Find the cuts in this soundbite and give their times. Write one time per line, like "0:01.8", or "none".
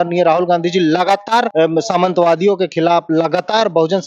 0:01.5